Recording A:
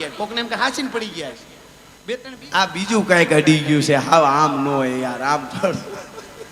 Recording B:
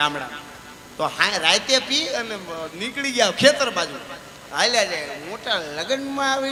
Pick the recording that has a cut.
A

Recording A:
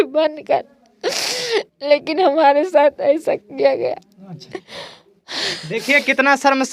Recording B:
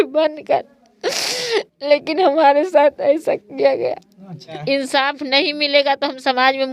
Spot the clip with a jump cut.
B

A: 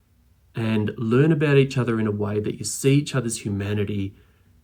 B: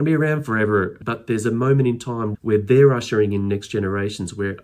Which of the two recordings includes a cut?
B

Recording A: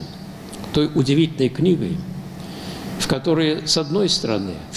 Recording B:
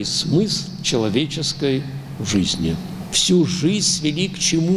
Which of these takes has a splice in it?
B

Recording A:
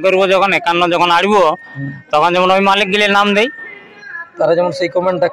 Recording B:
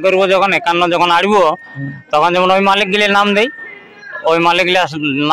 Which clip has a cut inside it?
B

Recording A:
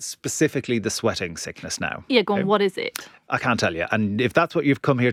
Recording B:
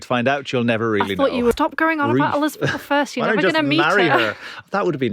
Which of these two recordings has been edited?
B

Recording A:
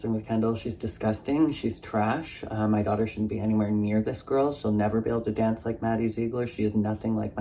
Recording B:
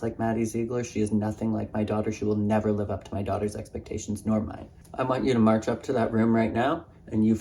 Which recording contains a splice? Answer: B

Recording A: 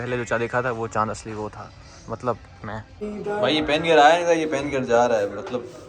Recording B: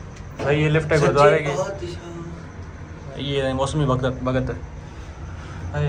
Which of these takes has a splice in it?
A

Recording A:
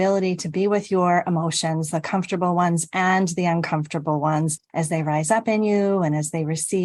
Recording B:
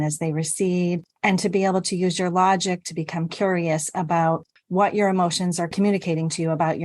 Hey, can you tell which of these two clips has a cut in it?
B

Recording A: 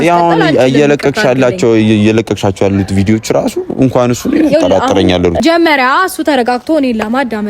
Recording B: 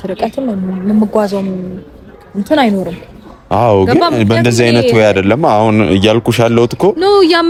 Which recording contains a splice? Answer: A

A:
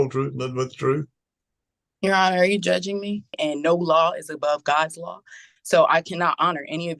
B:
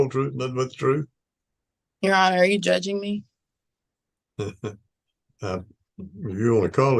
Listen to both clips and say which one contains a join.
A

